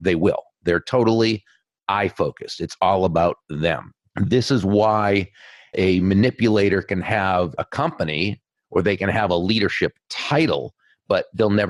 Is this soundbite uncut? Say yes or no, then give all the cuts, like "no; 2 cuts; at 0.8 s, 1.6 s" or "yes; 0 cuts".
yes; 0 cuts